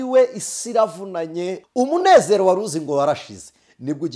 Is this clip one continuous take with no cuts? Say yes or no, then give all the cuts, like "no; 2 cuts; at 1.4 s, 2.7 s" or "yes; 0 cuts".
no; 1 cut; at 1.6 s